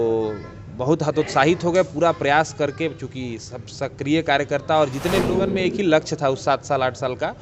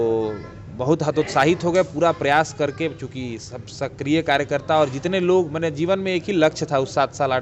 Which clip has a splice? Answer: first; 1 cut; at 5.3 s

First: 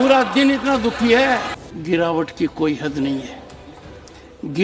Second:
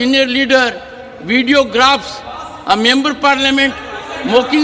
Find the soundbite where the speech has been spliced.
first; 1 cut; at 1.6 s

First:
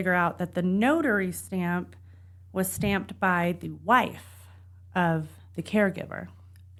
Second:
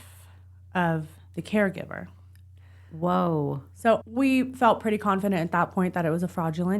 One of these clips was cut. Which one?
second; 1 cut; at 4.0 s

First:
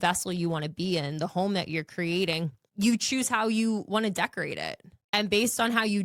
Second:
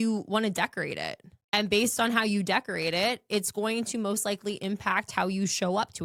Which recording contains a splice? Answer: first; 1 cut; at 2.6 s

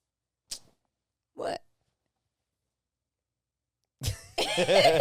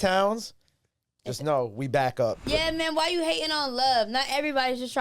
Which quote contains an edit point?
second; 1 cut; at 2.4 s

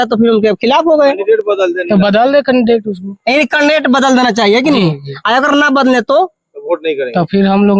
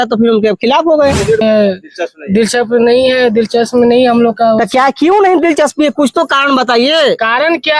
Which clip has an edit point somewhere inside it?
second; 1 cut; at 1.4 s

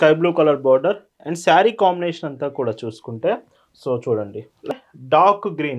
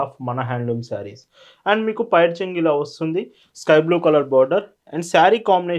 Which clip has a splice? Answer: first; 1 cut; at 4.7 s

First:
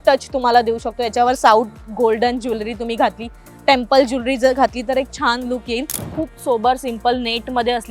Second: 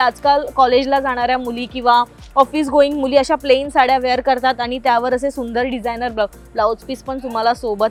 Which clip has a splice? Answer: first; 1 cut; at 6.0 s

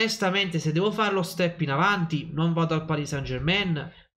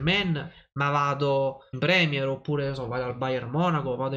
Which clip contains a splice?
second; 1 cut; at 1.7 s

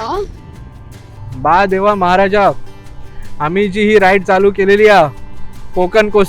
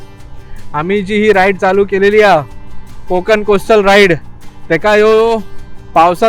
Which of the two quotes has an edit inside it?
first; 1 cut; at 1.2 s

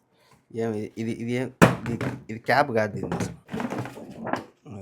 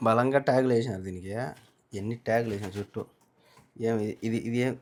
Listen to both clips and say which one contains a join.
first; 1 cut; at 3.4 s

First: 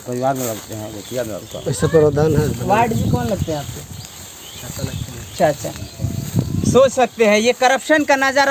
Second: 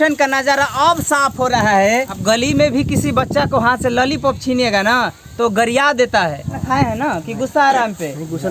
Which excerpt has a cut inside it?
second; 2 cuts; at 2.2 s, 6.6 s

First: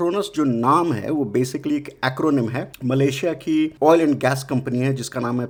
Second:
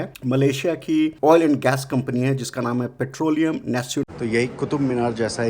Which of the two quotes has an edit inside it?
second; 1 cut; at 4.1 s

